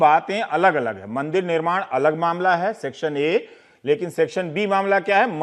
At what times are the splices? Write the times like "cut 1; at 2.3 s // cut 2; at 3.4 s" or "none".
none